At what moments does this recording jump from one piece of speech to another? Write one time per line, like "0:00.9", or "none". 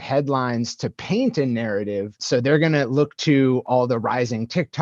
0:02.2
0:03.6